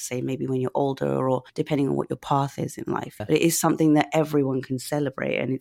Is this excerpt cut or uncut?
cut